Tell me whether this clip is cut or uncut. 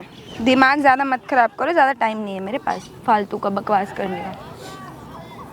uncut